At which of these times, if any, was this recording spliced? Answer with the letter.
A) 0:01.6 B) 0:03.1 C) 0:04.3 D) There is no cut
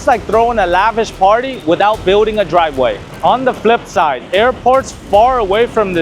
B